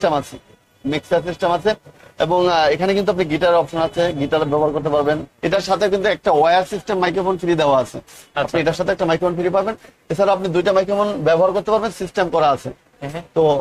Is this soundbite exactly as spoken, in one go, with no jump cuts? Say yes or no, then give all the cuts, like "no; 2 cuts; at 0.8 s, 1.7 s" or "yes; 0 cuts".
no; 1 cut; at 5.3 s